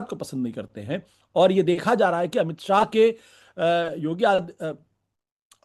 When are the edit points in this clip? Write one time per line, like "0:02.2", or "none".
none

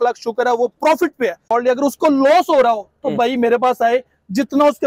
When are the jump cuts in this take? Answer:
0:01.4

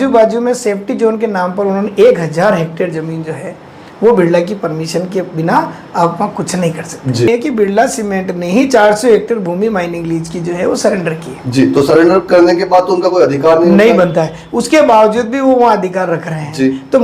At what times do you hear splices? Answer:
0:07.3

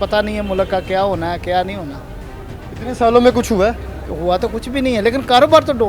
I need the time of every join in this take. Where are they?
none

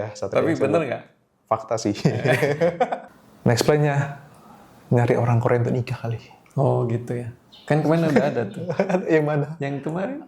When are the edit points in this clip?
0:03.0

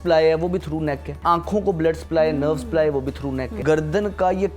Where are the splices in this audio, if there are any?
0:01.1
0:03.6

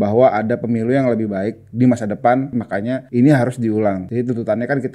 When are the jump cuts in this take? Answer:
0:02.7
0:04.0

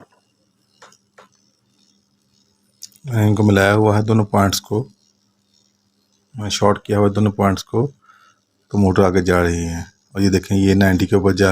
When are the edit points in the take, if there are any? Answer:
none

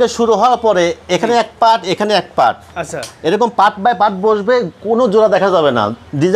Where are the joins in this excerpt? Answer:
none

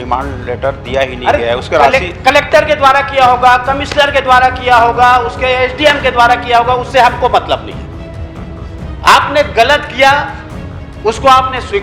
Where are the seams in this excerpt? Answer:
none

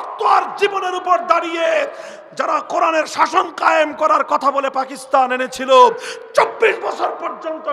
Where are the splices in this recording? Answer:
none

